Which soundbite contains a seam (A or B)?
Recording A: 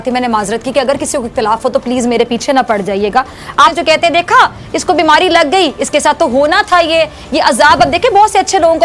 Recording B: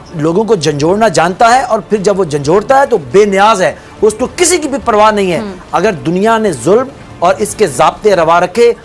A